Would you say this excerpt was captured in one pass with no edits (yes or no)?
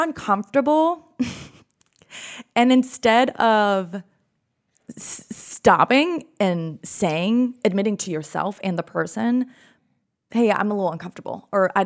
yes